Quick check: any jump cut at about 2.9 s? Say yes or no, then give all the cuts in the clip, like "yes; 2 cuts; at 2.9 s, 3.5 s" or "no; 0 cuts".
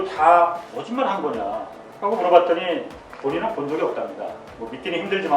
yes; 1 cut; at 2.9 s